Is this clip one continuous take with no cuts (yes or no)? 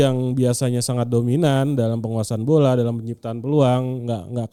yes